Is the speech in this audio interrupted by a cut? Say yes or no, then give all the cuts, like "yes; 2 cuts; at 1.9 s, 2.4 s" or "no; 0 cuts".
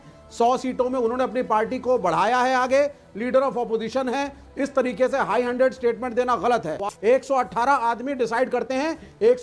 yes; 1 cut; at 6.7 s